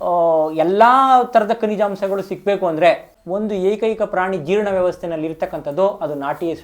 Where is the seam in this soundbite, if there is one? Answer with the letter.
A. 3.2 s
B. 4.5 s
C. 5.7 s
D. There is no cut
A